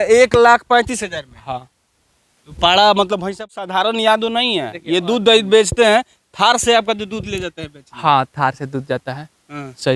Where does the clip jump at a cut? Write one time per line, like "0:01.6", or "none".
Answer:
0:03.5